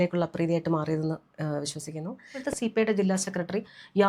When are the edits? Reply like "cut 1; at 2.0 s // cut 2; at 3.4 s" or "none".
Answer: cut 1; at 2.5 s